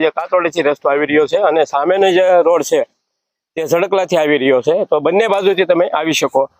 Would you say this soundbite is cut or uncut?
uncut